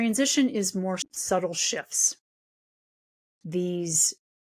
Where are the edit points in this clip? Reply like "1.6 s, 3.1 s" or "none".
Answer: 1.0 s